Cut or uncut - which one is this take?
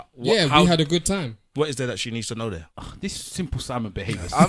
cut